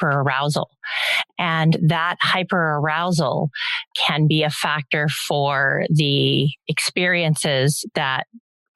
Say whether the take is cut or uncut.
cut